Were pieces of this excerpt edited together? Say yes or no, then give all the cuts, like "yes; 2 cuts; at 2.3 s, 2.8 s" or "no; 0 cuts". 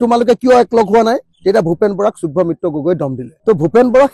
no; 0 cuts